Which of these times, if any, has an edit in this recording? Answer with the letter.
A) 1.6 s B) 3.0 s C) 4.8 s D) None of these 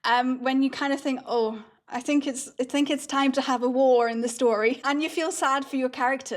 C